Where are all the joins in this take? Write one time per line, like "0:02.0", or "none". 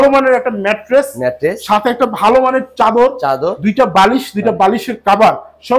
none